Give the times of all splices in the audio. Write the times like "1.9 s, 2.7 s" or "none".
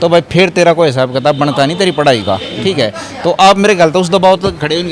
none